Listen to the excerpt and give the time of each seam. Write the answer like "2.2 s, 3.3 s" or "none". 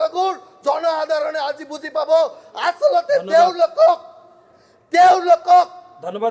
none